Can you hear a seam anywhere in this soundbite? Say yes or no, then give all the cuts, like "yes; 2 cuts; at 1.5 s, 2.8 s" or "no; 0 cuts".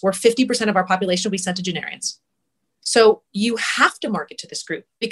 no; 0 cuts